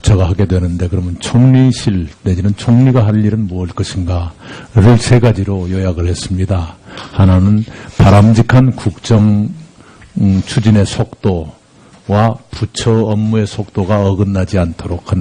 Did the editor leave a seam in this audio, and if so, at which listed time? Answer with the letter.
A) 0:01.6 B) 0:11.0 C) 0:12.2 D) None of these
C